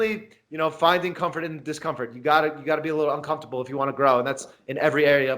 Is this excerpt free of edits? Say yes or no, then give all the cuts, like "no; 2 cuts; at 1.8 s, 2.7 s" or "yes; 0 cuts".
yes; 0 cuts